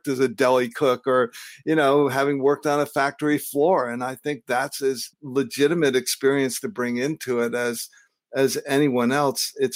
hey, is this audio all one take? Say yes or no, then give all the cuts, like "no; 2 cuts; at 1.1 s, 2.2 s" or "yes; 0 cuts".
no; 1 cut; at 5.1 s